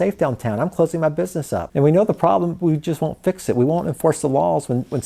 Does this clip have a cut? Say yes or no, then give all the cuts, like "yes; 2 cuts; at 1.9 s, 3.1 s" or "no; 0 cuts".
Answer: yes; 1 cut; at 1.7 s